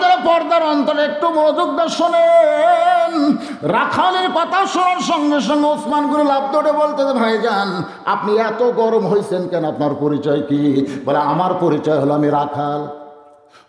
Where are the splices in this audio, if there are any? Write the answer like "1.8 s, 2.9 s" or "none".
none